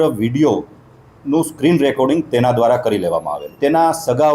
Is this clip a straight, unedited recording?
no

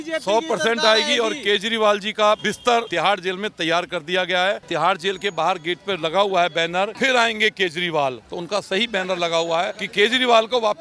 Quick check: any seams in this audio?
yes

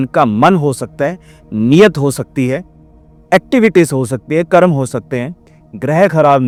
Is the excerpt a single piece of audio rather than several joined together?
yes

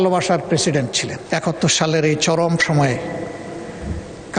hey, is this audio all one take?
no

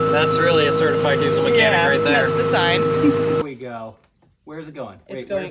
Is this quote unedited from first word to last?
no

